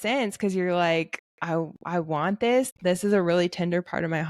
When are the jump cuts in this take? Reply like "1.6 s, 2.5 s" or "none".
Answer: 2.7 s